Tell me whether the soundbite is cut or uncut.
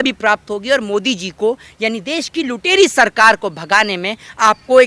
uncut